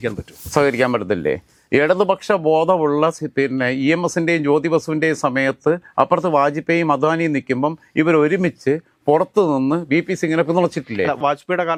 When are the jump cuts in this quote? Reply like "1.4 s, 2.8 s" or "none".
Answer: none